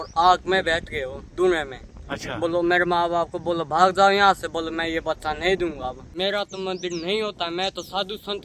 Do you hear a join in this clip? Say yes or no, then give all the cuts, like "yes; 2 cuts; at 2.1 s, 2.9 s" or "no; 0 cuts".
yes; 1 cut; at 6.0 s